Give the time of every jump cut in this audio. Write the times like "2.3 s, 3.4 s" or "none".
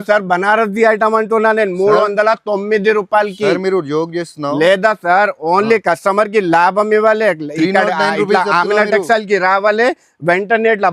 none